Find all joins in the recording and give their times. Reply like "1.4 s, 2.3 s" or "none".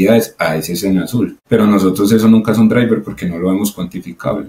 1.4 s